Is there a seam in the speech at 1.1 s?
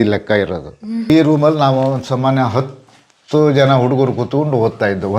yes; 1 cut; at 1.1 s

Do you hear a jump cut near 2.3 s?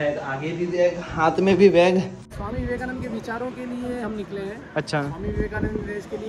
yes; 1 cut; at 2.3 s

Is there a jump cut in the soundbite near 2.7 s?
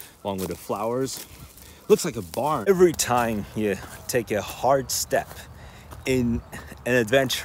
yes; 1 cut; at 2.7 s

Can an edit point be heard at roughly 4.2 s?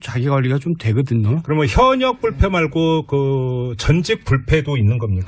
yes; 1 cut; at 4.2 s

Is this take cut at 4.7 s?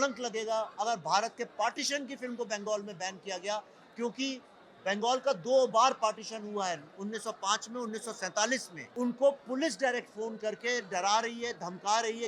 no; 1 cut; at 8.8 s

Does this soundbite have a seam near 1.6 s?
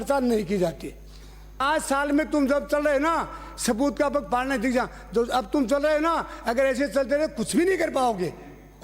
yes; 1 cut; at 1.6 s

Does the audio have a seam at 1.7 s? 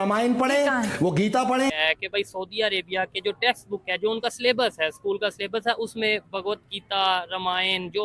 yes; 1 cut; at 1.7 s

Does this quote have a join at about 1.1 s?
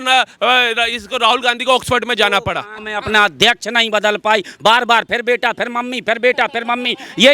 no; 1 cut; at 2.8 s

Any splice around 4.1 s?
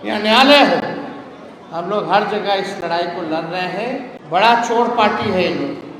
yes; 1 cut; at 4.1 s

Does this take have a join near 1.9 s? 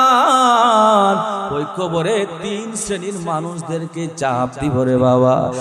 no; 0 cuts

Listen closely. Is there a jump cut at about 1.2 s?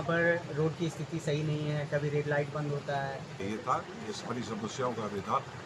no; 1 cut; at 3.4 s

